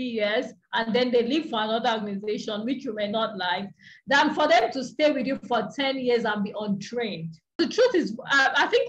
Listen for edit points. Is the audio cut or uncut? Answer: cut